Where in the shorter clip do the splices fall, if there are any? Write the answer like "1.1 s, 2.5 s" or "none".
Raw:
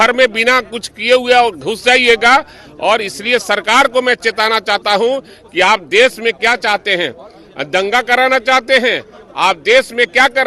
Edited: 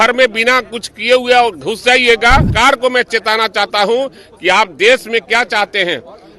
2.5 s

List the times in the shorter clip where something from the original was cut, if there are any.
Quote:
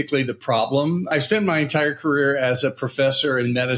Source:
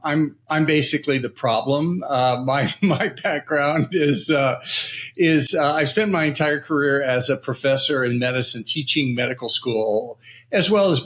1.1 s

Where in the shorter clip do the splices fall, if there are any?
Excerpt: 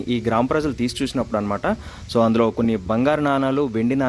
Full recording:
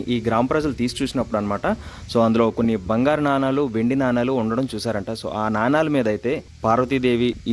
none

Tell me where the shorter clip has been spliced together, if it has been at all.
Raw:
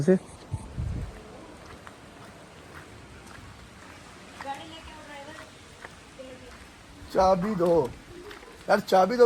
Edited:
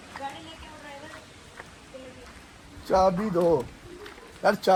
none

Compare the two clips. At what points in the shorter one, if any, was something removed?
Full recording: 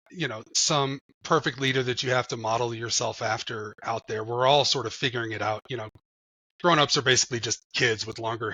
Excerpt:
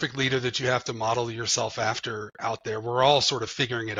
none

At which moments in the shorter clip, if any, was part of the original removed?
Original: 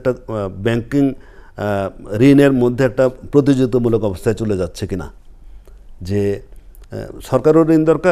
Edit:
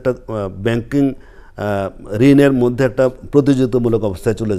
none

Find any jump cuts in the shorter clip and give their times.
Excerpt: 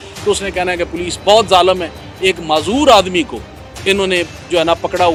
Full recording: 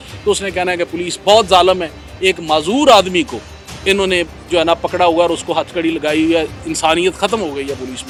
none

